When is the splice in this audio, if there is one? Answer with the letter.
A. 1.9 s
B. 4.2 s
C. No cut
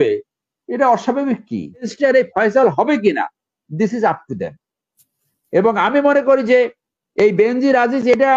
A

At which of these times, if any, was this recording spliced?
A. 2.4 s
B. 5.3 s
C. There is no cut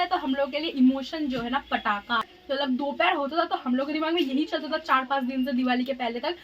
A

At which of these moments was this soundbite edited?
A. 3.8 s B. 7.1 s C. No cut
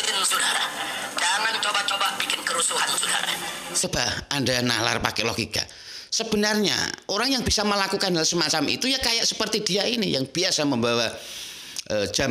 A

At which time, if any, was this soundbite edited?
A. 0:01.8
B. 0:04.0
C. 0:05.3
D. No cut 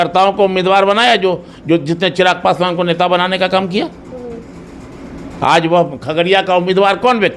D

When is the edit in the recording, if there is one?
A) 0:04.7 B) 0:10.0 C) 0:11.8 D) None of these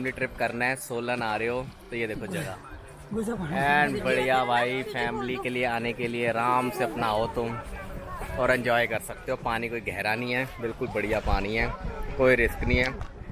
D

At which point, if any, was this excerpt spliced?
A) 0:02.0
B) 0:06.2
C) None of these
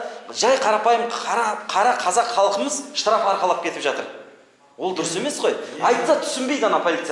C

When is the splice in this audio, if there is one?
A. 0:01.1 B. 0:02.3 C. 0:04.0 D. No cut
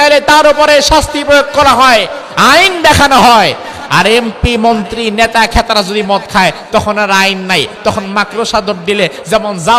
D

